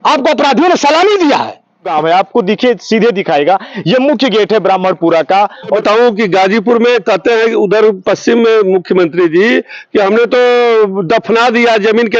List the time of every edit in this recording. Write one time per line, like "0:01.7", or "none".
0:01.9
0:05.8